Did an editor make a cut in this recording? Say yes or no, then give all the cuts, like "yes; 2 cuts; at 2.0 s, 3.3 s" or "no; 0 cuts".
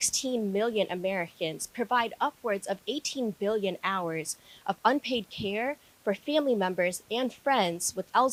no; 0 cuts